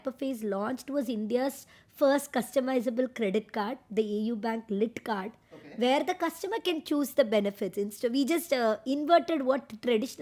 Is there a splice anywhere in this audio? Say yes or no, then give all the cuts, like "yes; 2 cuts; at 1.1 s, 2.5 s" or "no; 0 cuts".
no; 0 cuts